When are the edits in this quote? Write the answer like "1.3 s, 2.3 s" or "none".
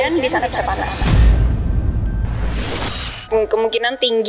3.1 s